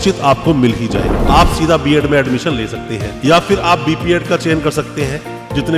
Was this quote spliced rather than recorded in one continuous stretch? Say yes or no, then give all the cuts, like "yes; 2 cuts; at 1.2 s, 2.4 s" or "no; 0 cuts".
yes; 1 cut; at 1.1 s